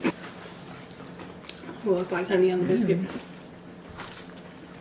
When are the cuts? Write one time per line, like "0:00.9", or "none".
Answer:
none